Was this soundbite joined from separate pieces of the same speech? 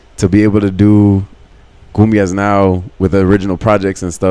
no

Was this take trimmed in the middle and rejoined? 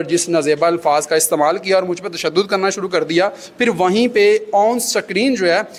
no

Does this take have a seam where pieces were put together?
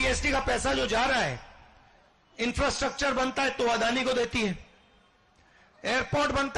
no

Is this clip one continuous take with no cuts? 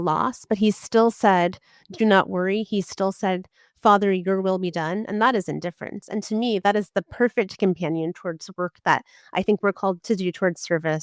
no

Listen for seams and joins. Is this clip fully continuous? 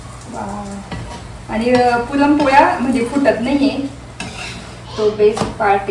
yes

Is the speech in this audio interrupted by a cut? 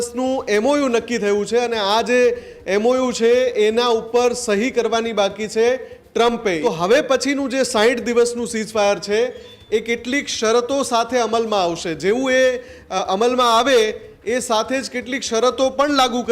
yes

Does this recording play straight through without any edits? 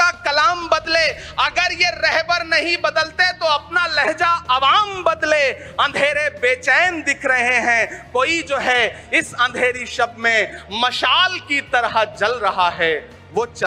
yes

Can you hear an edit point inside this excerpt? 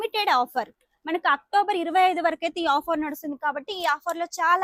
no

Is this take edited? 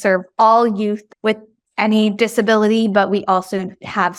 no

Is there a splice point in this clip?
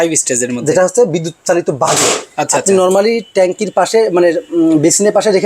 no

